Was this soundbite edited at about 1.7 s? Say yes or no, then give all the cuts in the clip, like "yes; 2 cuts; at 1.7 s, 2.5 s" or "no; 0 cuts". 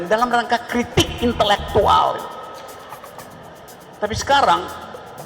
no; 1 cut; at 3.2 s